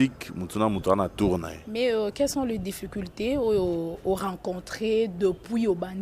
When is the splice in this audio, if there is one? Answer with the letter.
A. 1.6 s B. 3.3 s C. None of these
A